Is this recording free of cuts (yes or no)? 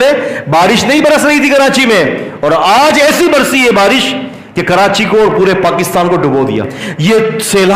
no